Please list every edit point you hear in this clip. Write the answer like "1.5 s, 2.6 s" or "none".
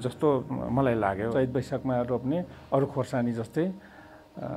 1.3 s